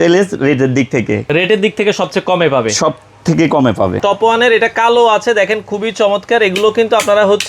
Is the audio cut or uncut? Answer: cut